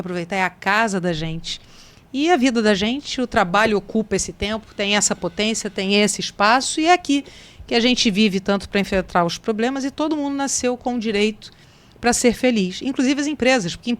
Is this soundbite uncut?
yes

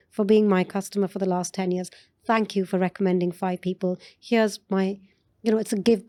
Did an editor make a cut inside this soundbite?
no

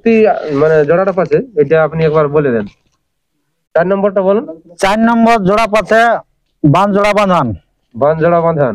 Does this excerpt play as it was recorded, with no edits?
yes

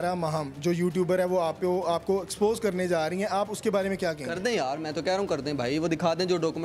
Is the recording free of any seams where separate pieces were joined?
yes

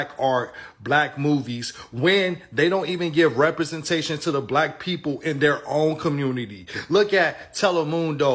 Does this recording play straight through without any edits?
yes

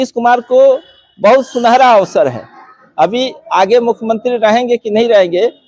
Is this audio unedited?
yes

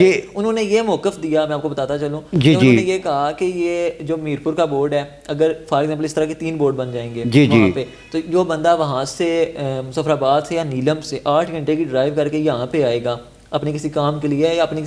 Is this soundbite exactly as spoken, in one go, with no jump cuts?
yes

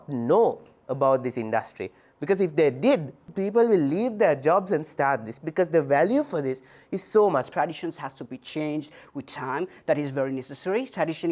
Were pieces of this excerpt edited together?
yes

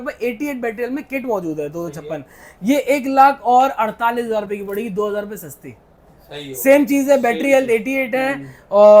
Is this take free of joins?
yes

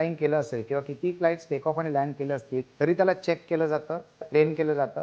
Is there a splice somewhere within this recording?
yes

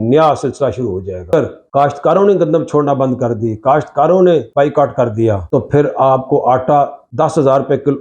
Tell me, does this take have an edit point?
yes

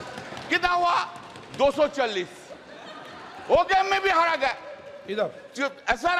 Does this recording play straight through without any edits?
yes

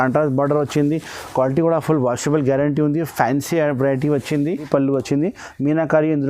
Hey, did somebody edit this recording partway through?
yes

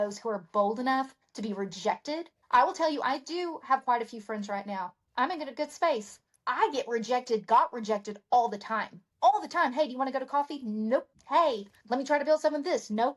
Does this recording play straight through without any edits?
yes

